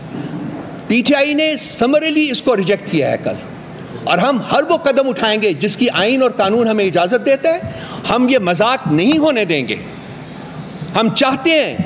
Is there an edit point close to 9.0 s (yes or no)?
no